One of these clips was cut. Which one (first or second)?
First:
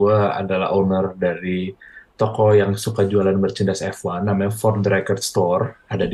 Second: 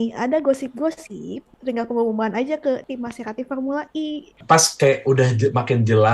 second